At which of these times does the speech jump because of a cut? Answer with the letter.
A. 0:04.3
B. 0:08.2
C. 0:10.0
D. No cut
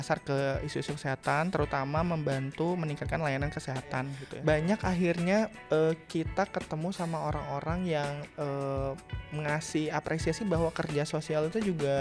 A